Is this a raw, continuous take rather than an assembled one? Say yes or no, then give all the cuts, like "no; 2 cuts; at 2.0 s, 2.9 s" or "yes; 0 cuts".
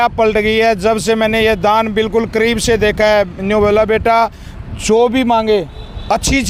yes; 0 cuts